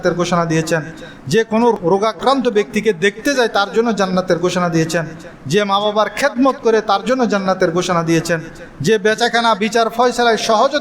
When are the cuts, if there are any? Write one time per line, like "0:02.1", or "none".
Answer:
0:01.8